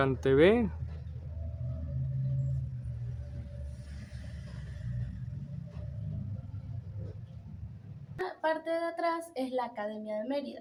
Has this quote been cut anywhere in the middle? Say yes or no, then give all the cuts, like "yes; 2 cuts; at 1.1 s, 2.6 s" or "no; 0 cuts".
no; 0 cuts